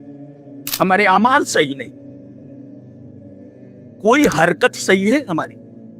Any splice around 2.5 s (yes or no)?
yes